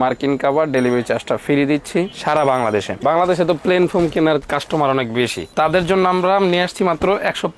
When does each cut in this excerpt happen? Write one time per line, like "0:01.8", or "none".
0:03.0